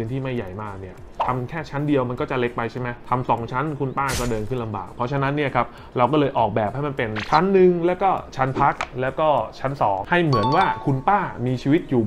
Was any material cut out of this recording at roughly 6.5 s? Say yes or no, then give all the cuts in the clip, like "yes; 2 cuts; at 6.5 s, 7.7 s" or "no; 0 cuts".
no; 2 cuts; at 3.0 s, 10.0 s